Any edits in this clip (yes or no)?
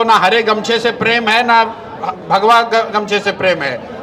no